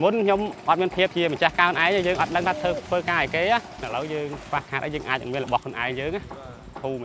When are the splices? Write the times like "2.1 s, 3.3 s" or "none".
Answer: 3.8 s